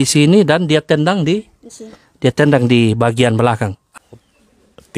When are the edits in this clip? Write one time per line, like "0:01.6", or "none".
0:03.8